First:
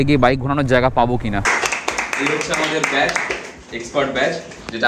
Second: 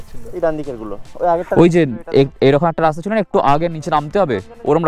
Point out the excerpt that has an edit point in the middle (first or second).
first